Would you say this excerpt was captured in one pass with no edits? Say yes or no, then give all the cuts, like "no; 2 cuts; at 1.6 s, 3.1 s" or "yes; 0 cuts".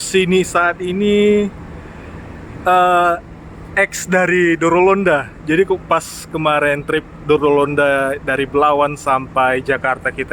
yes; 0 cuts